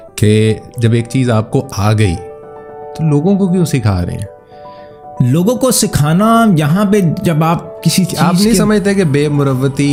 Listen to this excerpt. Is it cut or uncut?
uncut